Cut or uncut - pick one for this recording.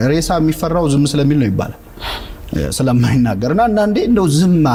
uncut